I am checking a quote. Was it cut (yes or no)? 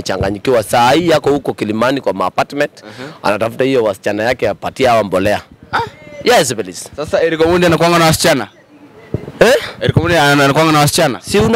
no